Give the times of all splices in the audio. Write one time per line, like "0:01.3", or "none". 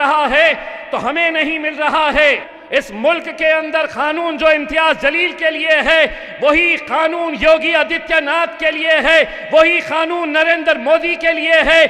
0:02.5